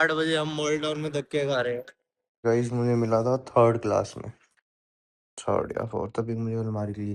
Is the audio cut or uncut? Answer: cut